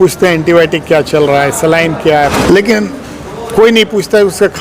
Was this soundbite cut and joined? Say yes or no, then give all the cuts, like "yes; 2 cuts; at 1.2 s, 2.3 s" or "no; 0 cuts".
yes; 1 cut; at 2.3 s